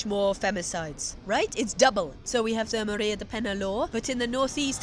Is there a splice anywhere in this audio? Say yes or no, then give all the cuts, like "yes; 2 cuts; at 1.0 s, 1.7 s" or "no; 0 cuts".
yes; 1 cut; at 2.2 s